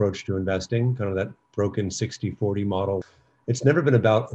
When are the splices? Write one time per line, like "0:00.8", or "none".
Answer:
0:03.0